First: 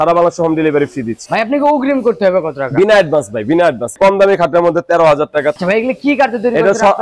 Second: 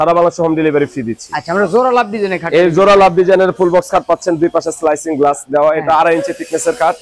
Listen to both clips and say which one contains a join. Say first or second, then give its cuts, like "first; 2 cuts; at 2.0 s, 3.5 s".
first; 3 cuts; at 1.2 s, 3.9 s, 5.6 s